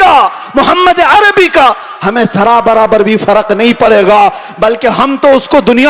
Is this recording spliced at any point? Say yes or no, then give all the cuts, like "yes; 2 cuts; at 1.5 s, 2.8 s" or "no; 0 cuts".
no; 0 cuts